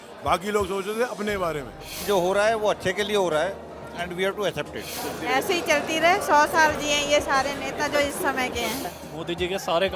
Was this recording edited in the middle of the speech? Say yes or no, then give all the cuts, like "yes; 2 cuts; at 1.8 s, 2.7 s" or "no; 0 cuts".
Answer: yes; 3 cuts; at 1.9 s, 4.9 s, 8.9 s